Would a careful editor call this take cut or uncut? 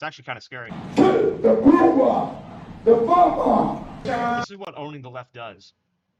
cut